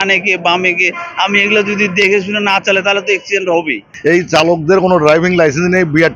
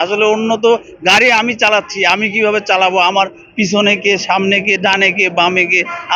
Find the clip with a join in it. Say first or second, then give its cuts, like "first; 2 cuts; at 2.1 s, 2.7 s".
first; 1 cut; at 3.9 s